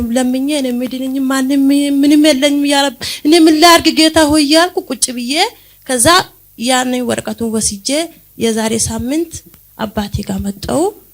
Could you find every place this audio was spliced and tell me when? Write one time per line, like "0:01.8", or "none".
none

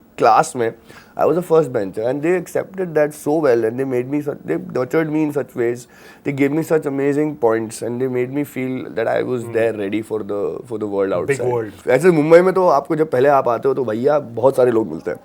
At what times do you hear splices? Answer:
0:11.7

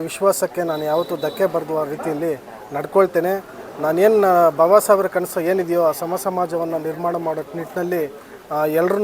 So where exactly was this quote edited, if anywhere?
none

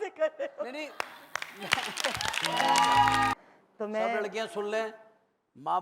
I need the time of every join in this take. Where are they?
0:03.3

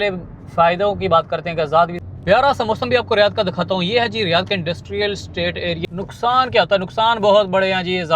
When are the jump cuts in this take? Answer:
0:02.0
0:05.8

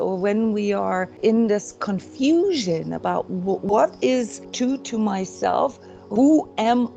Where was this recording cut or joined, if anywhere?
0:01.2
0:03.7
0:04.4
0:06.1

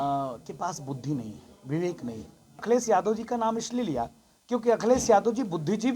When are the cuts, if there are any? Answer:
0:02.6

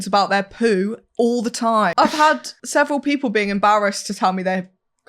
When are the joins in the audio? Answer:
0:01.9
0:02.5

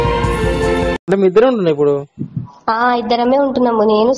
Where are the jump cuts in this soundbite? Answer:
0:00.9

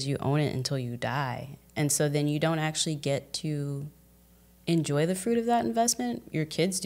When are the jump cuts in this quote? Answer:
none

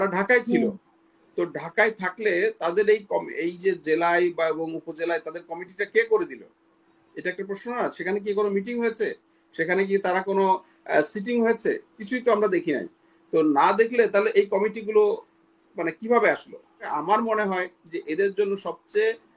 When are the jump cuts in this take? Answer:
0:16.9

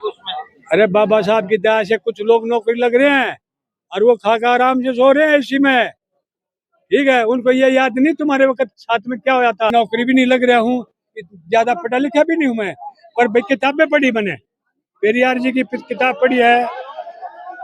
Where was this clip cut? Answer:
0:09.7

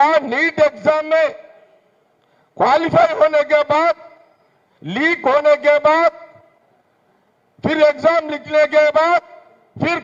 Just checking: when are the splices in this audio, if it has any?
none

